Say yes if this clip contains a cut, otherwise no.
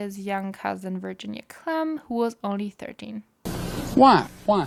no